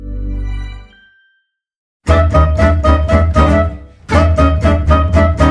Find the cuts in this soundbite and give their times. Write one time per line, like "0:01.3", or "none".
0:02.1